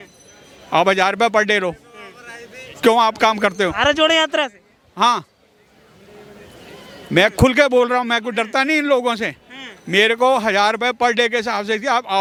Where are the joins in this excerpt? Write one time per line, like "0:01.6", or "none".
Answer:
none